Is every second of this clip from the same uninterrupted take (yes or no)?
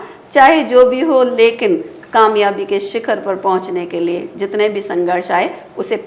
yes